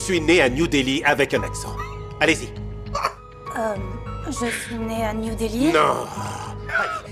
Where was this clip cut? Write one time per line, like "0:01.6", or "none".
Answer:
none